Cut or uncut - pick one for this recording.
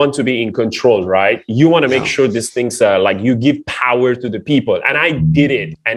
uncut